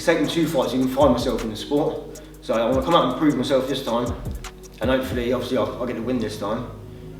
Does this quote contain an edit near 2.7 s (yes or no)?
no